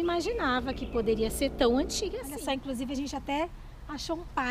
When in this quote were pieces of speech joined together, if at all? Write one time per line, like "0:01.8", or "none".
0:02.3

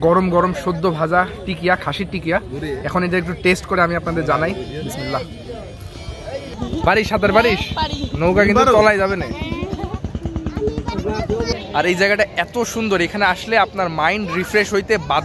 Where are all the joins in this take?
0:06.6
0:11.6

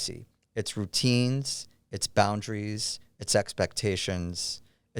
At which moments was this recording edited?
none

